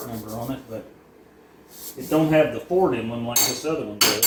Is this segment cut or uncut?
uncut